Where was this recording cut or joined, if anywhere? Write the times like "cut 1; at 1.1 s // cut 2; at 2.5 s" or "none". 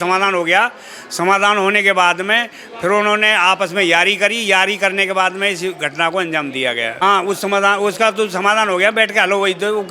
cut 1; at 7.0 s